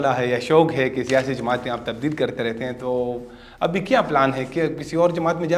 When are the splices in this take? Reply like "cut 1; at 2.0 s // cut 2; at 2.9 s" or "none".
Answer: none

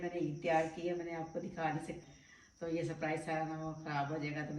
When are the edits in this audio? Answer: cut 1; at 2.0 s

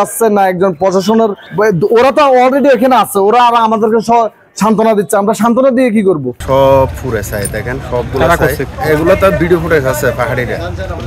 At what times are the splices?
cut 1; at 1.4 s // cut 2; at 6.3 s // cut 3; at 8.7 s

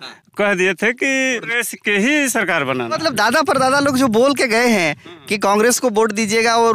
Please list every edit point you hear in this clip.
cut 1; at 1.6 s // cut 2; at 2.9 s

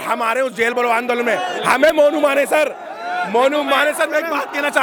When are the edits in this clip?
none

